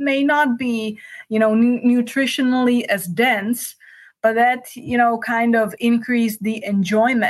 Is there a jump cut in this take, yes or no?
no